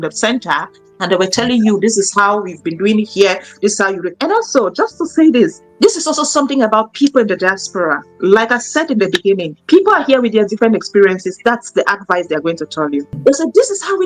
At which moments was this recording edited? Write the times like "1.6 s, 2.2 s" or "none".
4.1 s, 9.5 s